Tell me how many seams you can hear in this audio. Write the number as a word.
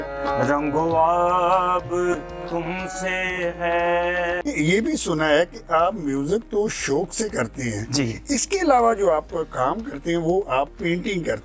one